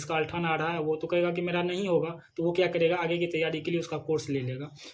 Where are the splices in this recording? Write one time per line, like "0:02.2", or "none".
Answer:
none